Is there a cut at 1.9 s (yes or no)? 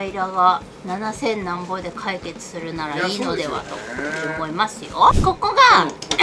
no